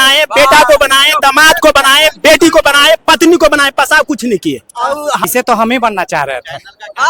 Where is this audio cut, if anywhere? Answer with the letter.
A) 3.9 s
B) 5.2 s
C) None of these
B